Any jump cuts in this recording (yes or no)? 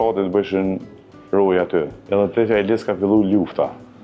yes